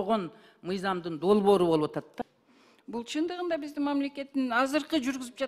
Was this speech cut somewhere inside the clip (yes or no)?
yes